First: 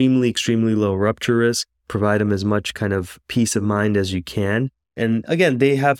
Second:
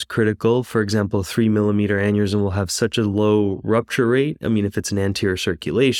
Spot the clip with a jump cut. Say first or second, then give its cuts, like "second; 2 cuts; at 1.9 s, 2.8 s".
first; 1 cut; at 4.9 s